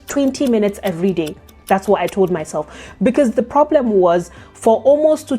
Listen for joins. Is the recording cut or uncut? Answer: uncut